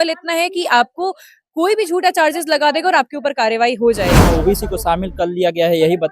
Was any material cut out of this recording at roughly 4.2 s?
yes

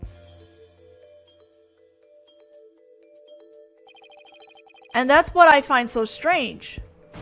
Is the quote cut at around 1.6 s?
no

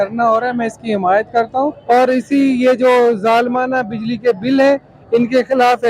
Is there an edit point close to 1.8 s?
yes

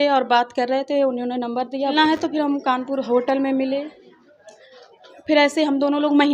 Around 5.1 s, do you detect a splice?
no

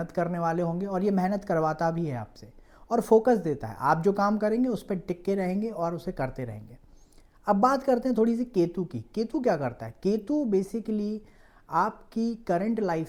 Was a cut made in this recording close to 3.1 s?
no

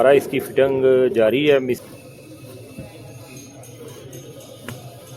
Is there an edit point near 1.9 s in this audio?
yes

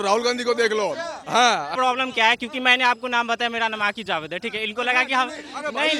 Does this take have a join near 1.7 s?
yes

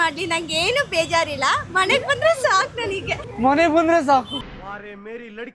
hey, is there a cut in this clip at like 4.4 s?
no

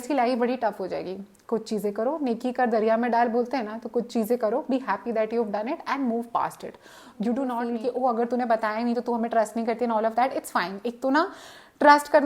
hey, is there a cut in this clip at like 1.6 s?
no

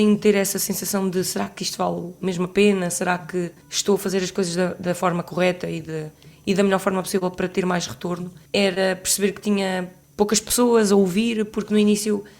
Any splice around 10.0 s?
yes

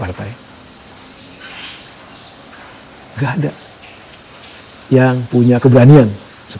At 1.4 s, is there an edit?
no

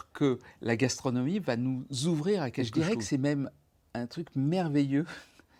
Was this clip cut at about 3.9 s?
no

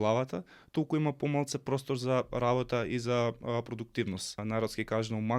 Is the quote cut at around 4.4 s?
yes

